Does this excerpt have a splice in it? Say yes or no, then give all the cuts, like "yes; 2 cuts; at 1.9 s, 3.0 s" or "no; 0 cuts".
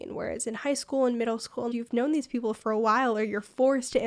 yes; 1 cut; at 1.7 s